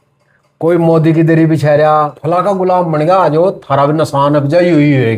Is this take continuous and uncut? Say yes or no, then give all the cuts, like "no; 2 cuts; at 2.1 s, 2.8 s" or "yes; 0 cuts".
no; 1 cut; at 2.2 s